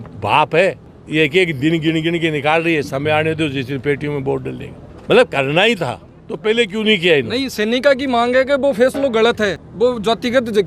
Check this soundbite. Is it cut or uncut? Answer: uncut